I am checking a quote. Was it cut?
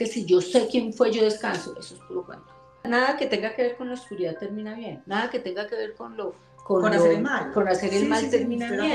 yes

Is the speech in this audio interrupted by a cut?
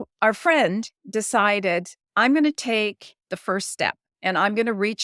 yes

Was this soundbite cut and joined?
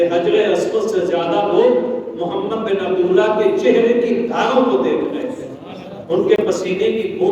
no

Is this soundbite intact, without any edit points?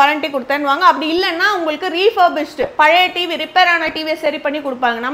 yes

